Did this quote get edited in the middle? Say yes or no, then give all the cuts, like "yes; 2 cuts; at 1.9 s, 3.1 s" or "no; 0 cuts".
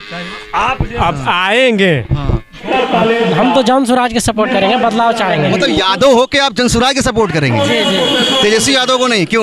yes; 1 cut; at 2.6 s